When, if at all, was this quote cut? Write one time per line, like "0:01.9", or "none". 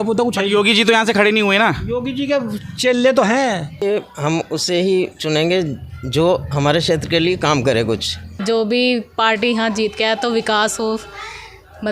0:03.7
0:08.4

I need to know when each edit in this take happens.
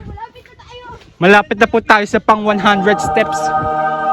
0:03.1

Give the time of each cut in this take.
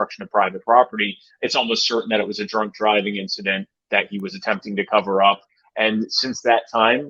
0:05.6

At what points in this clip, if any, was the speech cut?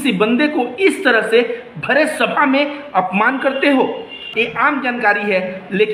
0:04.2

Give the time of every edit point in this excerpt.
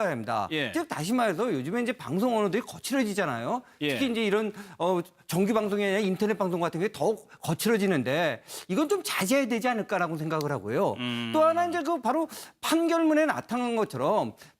0:08.8

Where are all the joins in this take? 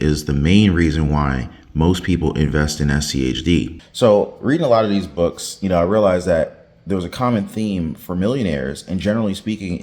0:03.7

